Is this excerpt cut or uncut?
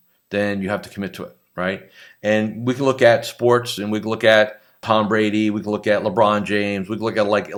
uncut